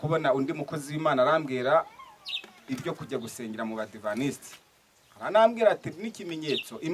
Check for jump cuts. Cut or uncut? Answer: uncut